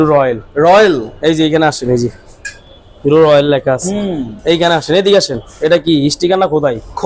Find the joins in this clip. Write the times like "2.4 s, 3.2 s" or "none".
none